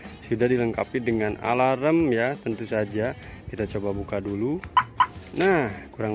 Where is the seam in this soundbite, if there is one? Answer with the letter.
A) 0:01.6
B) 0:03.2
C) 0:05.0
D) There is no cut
D